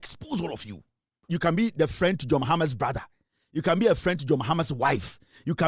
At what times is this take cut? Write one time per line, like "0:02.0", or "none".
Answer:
0:01.2